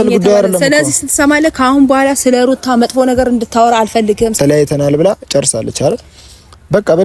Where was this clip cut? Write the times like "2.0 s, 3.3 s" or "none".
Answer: 4.4 s